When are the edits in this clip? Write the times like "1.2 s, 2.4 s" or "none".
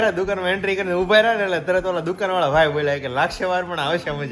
none